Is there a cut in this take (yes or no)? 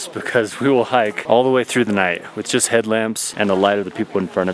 yes